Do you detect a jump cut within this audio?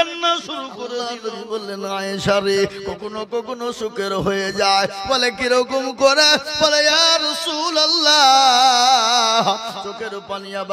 yes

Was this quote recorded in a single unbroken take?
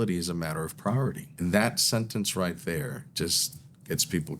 no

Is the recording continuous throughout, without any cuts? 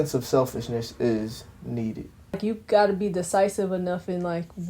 no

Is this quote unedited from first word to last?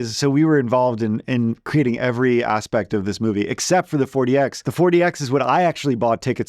no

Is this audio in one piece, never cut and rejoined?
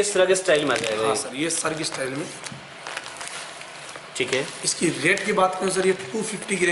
yes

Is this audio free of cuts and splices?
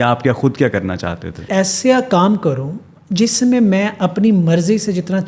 no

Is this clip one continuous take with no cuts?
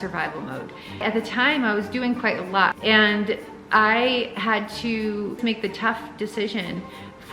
no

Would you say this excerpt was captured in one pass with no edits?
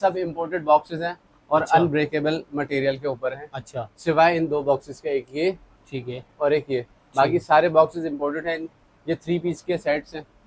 yes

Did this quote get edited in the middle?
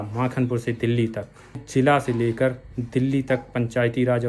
yes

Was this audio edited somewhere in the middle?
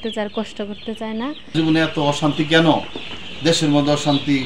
yes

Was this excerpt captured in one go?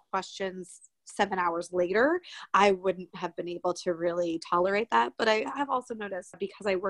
yes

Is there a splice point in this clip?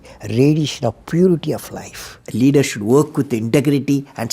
yes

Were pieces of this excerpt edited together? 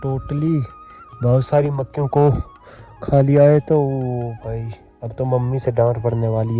no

